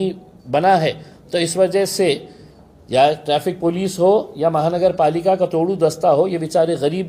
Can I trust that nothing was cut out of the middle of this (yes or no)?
yes